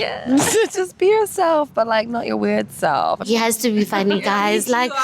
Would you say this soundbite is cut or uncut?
cut